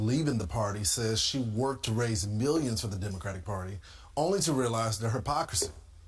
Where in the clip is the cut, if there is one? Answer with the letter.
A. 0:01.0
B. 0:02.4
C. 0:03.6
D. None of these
D